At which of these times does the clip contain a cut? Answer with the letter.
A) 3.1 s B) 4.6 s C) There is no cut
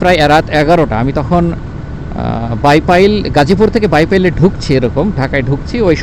C